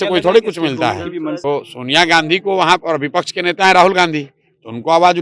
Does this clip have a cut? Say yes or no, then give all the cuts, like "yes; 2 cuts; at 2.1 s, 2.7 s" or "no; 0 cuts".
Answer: yes; 1 cut; at 1.4 s